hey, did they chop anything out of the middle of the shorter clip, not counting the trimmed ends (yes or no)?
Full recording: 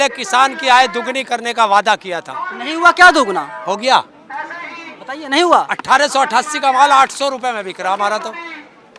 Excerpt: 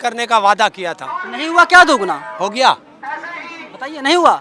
no